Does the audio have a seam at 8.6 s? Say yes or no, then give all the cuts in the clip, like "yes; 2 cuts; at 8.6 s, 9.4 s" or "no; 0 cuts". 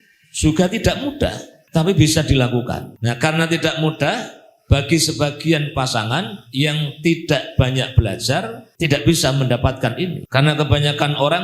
yes; 4 cuts; at 1.5 s, 2.9 s, 8.6 s, 10.2 s